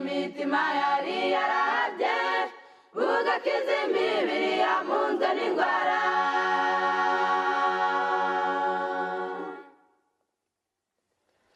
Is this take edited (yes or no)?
no